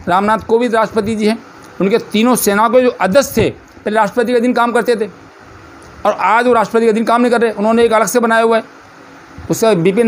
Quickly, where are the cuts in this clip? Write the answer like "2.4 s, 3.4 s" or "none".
none